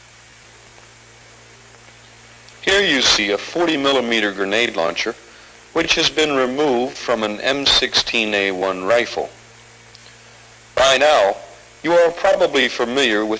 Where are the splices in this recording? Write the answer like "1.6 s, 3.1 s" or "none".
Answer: none